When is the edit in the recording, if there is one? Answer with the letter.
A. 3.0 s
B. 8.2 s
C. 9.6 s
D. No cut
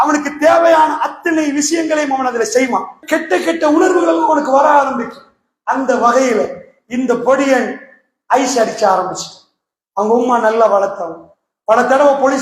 A